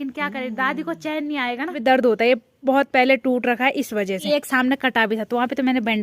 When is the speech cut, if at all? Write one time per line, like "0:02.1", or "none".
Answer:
0:01.7
0:04.2